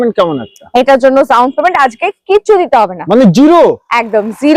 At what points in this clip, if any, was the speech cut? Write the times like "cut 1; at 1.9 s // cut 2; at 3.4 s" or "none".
none